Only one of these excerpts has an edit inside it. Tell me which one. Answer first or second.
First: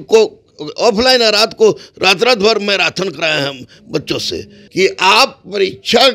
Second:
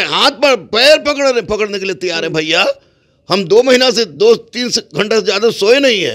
first